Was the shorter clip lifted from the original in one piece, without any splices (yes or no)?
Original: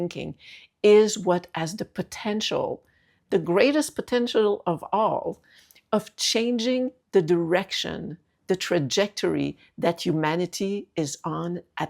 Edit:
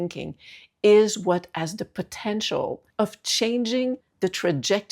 no